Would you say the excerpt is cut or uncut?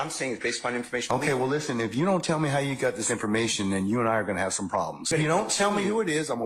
cut